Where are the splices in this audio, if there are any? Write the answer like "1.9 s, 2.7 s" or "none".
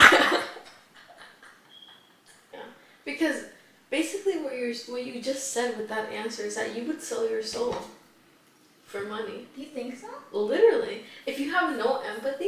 2.5 s